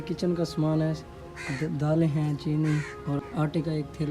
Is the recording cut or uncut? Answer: uncut